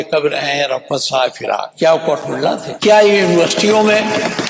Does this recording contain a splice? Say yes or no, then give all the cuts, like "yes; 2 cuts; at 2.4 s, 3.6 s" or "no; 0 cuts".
yes; 2 cuts; at 1.7 s, 2.7 s